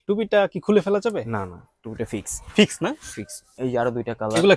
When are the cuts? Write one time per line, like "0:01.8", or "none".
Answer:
none